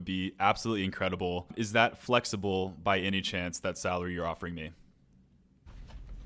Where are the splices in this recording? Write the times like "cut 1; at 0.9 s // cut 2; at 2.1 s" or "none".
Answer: cut 1; at 1.5 s